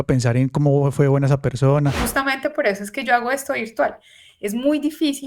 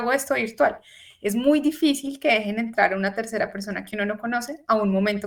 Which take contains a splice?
first; 1 cut; at 2.0 s

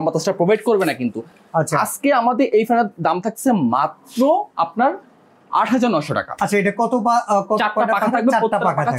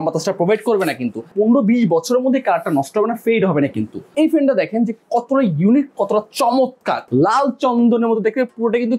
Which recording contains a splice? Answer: second; 3 cuts; at 1.3 s, 4.0 s, 7.0 s

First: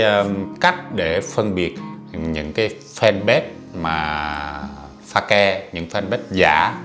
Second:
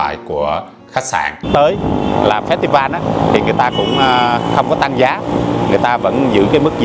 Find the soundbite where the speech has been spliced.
second; 1 cut; at 1.5 s

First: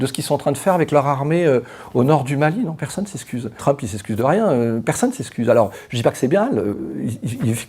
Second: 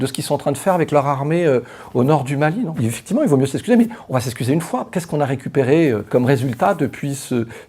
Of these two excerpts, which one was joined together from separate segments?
second; 3 cuts; at 2.7 s, 4.9 s, 6.1 s

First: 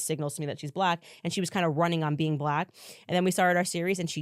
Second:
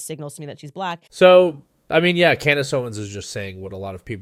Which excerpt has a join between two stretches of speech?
first; 1 cut; at 1.1 s

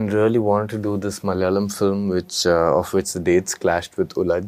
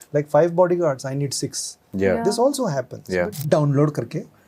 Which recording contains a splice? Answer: second; 1 cut; at 3.4 s

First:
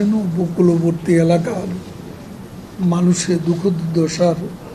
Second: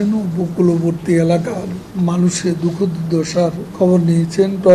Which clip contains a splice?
second; 2 cuts; at 1.8 s, 3.6 s

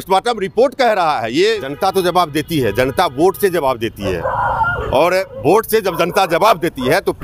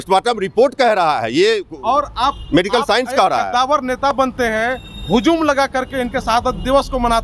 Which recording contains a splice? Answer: first; 1 cut; at 1.7 s

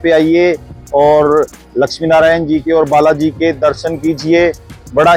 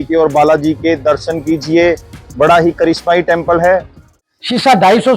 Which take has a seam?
second; 1 cut; at 4.0 s

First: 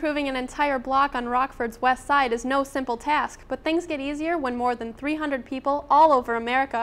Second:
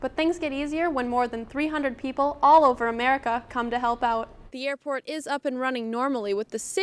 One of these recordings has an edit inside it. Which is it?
second; 1 cut; at 4.4 s

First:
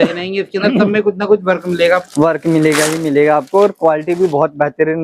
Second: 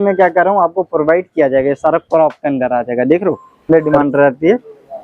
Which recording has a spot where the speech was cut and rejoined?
second; 1 cut; at 3.7 s

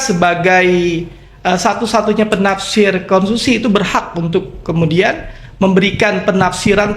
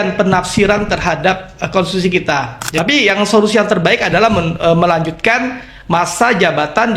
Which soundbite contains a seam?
second; 1 cut; at 2.6 s

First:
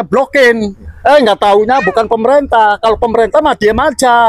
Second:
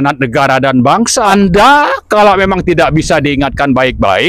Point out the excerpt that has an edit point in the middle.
second; 1 cut; at 1.3 s

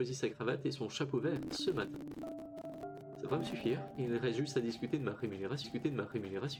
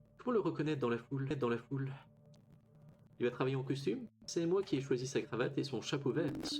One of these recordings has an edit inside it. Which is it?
second; 1 cut; at 1.2 s

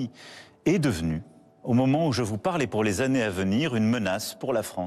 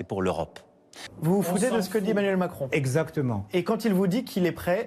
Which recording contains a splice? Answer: second; 1 cut; at 1.0 s

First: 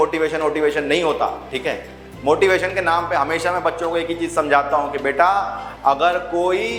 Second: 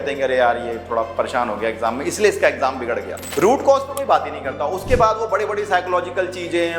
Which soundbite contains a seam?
second; 1 cut; at 3.2 s

